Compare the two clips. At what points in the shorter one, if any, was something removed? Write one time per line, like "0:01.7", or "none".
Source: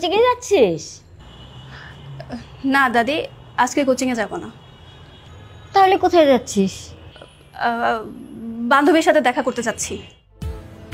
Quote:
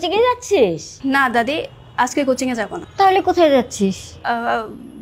0:00.9
0:02.8
0:04.1